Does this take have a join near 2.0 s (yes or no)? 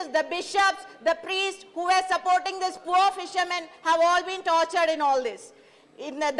no